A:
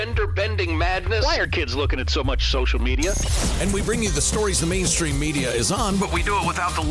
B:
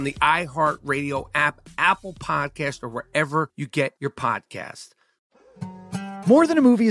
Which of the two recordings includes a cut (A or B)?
B